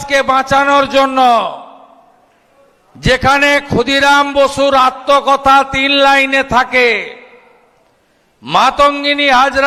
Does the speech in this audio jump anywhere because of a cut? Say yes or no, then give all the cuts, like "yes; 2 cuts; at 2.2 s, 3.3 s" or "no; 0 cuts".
no; 0 cuts